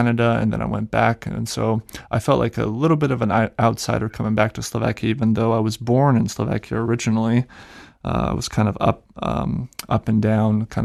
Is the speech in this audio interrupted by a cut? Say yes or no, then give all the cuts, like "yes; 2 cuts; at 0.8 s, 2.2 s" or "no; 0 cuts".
no; 0 cuts